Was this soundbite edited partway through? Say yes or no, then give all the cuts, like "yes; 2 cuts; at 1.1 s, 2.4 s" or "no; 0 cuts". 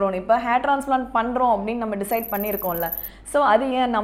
no; 0 cuts